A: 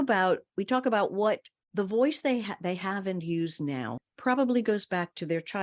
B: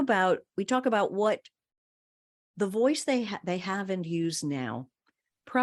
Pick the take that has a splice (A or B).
A